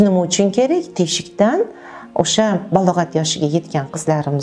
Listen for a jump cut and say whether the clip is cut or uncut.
uncut